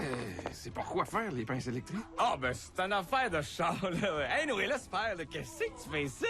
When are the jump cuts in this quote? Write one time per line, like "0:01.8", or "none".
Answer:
0:03.5